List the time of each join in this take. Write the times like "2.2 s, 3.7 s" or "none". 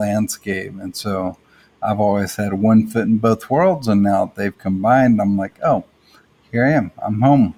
none